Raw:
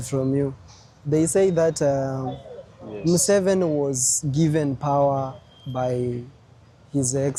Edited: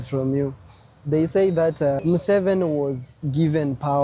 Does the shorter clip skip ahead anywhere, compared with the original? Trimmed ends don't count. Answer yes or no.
yes